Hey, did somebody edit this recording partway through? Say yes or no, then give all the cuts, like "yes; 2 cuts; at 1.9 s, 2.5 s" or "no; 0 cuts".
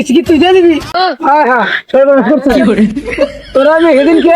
yes; 1 cut; at 0.9 s